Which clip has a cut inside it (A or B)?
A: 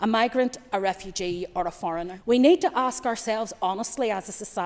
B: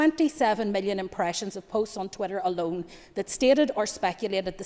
A